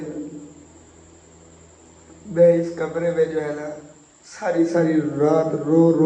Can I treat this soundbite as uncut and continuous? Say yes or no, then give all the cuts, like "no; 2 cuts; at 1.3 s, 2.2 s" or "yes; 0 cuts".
yes; 0 cuts